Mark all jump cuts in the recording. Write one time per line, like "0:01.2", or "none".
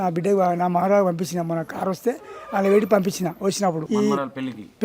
0:03.8